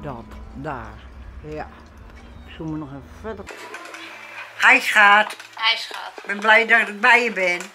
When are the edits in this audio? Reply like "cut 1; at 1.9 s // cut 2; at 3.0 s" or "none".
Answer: cut 1; at 3.5 s